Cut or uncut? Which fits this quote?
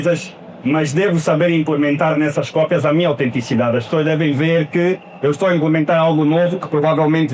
uncut